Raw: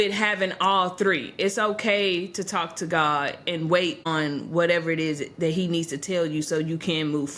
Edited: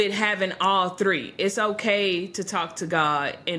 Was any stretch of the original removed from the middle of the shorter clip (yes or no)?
no